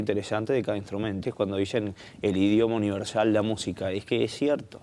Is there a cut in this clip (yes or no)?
no